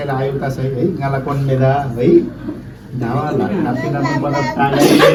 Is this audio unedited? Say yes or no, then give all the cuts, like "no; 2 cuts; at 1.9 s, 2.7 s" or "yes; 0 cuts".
yes; 0 cuts